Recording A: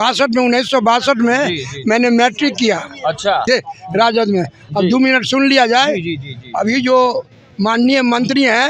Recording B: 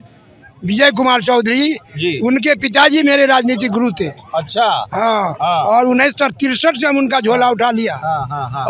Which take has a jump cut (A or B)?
A